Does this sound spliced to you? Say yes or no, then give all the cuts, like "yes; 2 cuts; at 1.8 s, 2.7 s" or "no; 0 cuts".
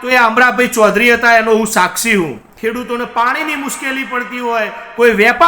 yes; 1 cut; at 2.5 s